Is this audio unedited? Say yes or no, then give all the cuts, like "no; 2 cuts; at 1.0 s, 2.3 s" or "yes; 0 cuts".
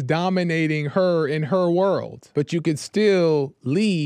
no; 1 cut; at 2.2 s